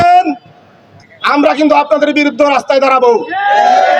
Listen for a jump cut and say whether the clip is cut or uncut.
uncut